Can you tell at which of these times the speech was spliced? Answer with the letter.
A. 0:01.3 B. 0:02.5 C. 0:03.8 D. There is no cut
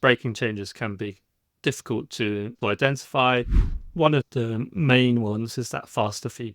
C